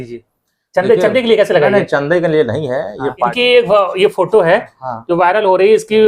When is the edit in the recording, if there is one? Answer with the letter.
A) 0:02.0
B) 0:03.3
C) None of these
B